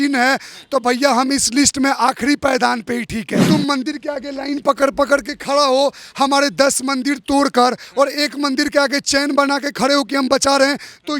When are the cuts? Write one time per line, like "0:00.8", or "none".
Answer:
0:03.3